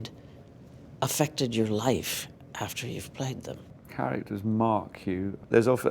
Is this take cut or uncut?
cut